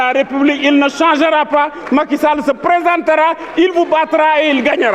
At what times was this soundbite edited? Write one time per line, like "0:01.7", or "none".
none